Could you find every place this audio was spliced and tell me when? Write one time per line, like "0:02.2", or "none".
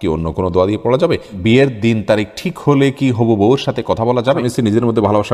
0:01.4
0:04.5